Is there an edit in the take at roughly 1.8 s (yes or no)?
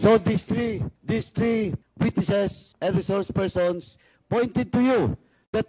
yes